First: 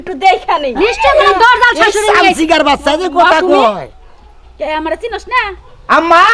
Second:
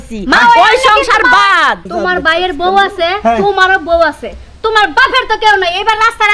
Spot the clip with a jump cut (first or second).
second